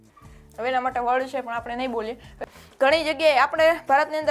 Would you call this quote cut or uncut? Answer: cut